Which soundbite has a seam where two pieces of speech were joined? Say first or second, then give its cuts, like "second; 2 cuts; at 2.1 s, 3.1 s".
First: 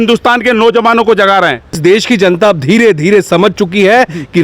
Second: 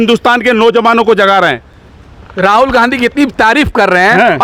first; 1 cut; at 1.8 s